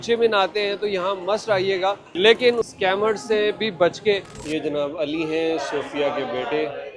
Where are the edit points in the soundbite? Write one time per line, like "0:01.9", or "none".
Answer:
0:02.1
0:02.7
0:04.3